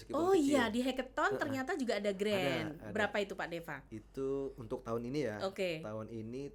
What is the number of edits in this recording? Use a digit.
0